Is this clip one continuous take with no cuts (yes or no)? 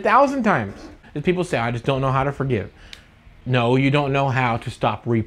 no